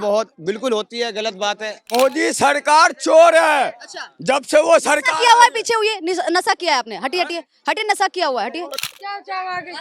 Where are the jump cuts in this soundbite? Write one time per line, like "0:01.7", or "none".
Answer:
0:01.9
0:08.7